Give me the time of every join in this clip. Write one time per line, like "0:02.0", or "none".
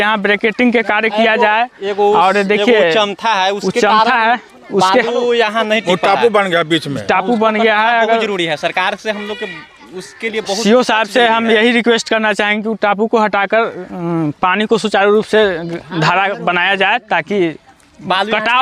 none